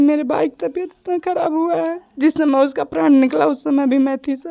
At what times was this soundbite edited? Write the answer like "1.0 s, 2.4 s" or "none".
none

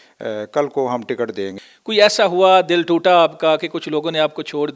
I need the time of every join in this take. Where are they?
1.6 s

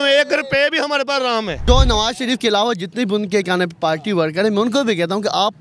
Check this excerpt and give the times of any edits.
1.5 s

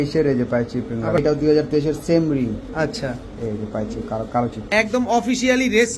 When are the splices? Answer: 1.2 s, 4.6 s

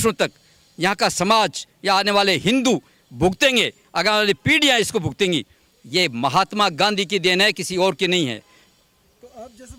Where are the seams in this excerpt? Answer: none

